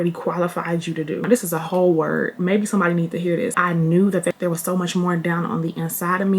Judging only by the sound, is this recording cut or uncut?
cut